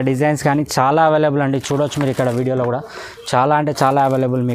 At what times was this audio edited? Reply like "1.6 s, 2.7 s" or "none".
none